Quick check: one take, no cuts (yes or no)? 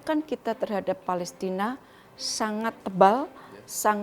no